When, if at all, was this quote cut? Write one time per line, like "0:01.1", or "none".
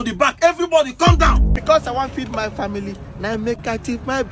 0:01.5